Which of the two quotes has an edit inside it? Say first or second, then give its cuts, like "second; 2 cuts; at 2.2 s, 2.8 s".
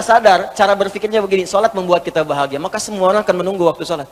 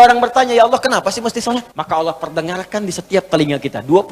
second; 1 cut; at 1.7 s